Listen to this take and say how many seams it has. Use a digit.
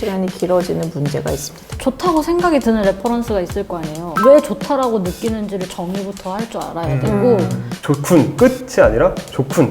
2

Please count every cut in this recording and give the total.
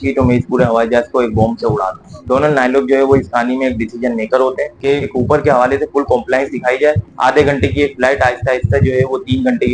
3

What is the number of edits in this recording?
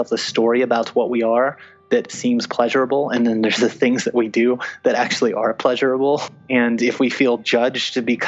1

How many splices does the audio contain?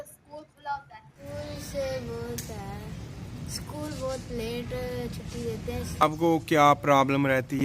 2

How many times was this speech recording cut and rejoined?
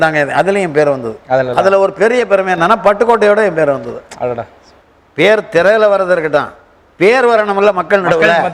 0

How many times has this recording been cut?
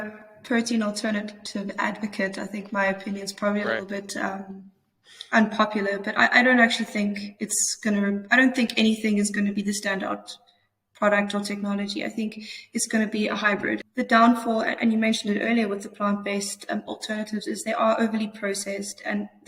1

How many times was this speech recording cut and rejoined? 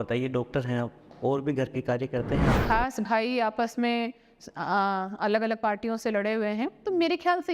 1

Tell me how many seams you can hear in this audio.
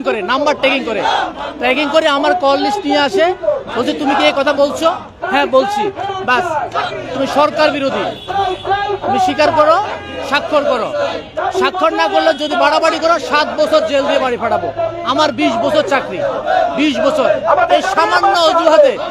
0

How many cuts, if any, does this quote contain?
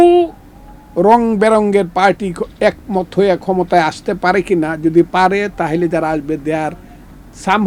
0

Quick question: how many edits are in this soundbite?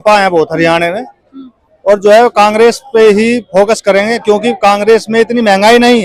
0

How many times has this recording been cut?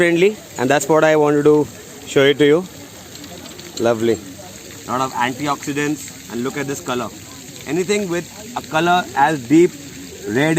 1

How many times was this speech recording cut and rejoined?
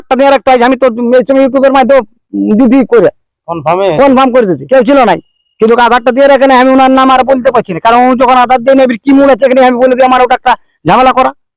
1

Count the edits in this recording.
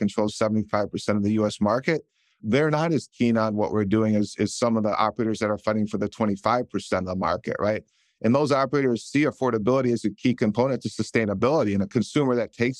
0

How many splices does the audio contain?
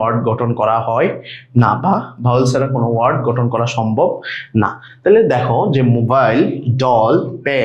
0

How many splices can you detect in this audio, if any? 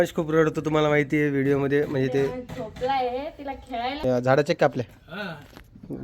1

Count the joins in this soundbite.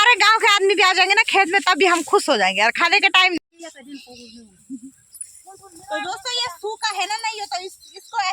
1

